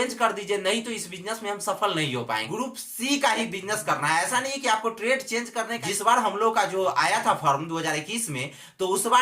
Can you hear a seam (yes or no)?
yes